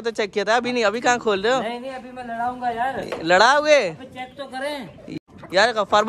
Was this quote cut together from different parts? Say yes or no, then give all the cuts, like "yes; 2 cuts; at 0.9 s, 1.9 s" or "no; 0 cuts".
yes; 1 cut; at 5.1 s